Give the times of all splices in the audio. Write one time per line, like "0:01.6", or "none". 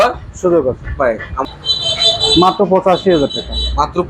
0:01.4